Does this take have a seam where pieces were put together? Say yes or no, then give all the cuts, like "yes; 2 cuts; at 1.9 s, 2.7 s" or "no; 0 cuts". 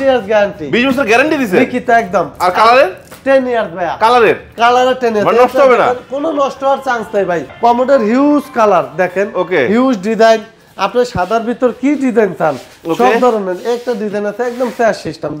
yes; 1 cut; at 7.5 s